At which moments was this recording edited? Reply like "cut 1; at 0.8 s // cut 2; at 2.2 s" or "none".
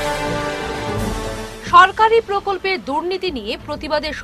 none